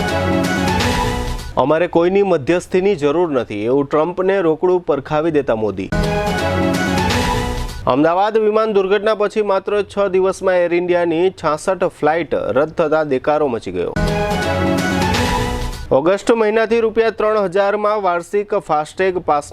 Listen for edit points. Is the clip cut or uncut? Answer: cut